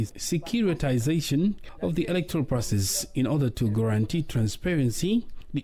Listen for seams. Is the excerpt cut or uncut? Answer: uncut